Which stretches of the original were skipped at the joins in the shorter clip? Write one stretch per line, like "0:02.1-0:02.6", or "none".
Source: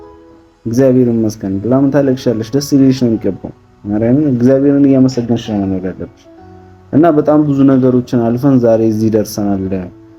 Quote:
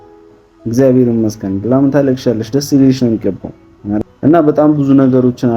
0:04.0-0:06.7